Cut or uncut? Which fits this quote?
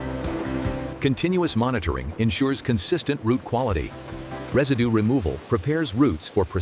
uncut